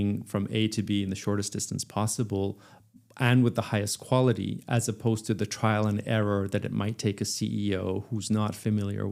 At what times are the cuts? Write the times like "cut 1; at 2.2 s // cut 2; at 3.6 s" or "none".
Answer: none